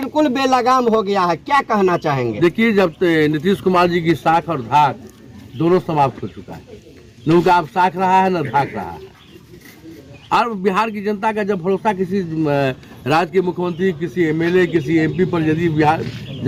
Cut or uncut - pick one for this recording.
uncut